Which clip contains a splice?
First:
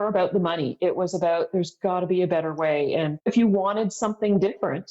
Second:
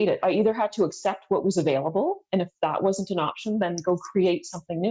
first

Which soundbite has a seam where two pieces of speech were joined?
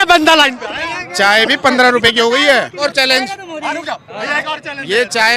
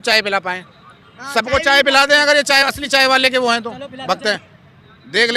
first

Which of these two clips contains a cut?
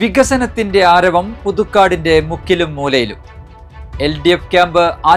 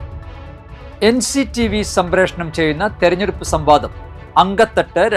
second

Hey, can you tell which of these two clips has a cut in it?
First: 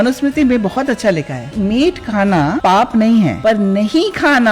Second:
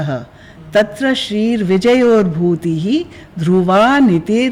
first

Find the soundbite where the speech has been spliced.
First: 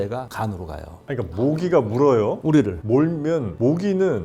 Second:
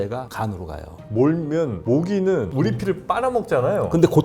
second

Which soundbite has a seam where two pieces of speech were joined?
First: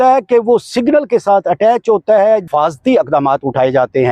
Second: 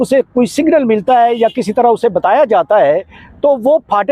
first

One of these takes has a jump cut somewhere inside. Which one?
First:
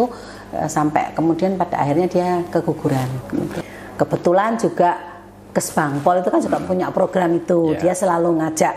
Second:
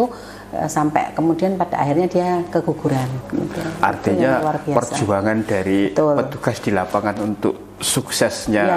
first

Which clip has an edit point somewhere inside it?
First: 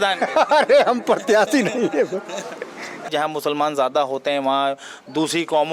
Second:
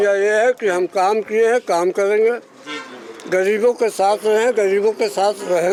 first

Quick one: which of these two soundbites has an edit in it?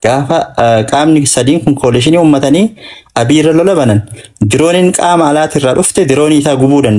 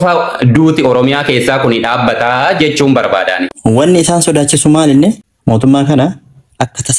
second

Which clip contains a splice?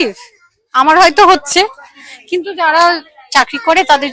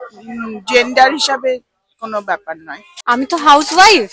second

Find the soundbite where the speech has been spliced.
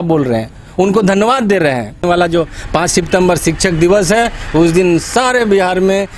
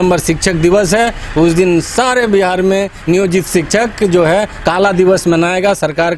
first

